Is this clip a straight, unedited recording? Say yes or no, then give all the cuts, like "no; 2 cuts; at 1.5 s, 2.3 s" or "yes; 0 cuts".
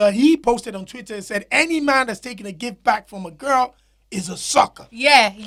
yes; 0 cuts